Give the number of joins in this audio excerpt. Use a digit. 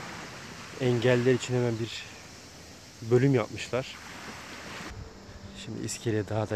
1